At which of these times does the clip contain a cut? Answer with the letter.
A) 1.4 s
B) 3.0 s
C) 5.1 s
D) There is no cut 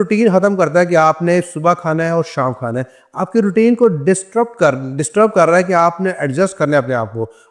D